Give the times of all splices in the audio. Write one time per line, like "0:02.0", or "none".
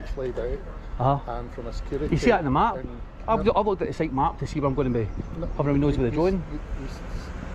none